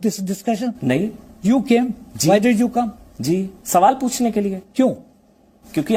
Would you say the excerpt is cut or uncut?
uncut